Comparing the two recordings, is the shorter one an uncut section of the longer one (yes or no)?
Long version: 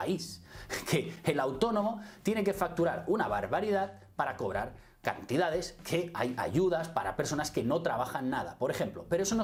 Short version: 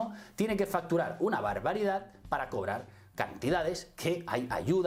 yes